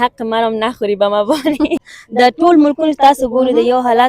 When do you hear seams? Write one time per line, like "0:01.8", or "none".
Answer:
0:01.8